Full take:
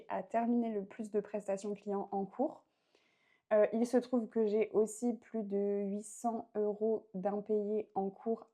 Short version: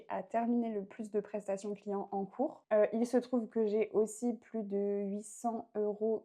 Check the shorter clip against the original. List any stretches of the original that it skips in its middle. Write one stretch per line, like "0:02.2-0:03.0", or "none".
0:02.6-0:03.4

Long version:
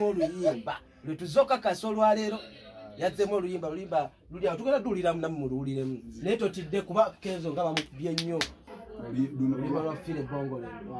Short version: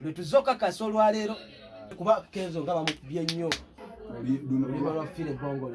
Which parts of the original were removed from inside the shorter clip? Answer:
0:03.0-0:06.8

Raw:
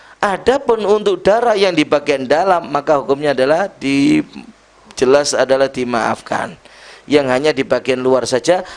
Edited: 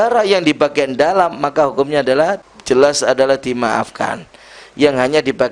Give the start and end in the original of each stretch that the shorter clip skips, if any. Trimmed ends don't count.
0:03.8-0:04.8

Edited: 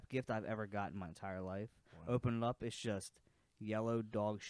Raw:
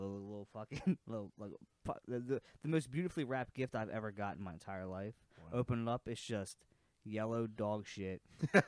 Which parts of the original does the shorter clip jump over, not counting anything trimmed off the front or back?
none

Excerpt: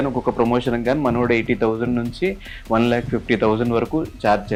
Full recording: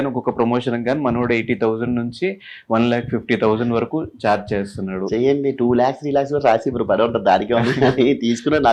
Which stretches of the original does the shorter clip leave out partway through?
none

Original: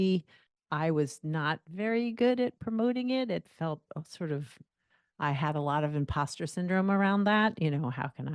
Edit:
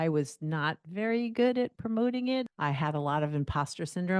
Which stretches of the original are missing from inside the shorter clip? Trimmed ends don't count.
0:03.3-0:05.1

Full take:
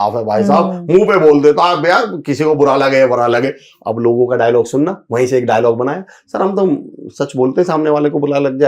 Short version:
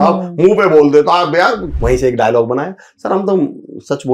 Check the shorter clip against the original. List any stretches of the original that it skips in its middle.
0:02.2-0:05.0

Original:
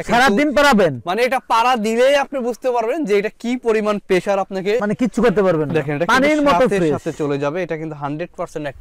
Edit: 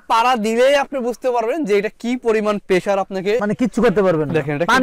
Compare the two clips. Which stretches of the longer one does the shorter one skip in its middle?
none

